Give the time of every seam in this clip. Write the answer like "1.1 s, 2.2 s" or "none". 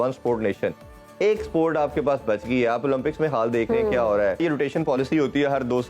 4.4 s